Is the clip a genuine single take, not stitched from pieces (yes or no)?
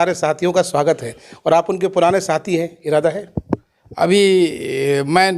yes